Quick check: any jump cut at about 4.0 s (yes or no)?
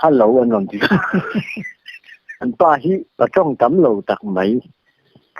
no